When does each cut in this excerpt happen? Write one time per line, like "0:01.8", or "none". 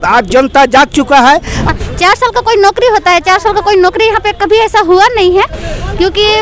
0:01.7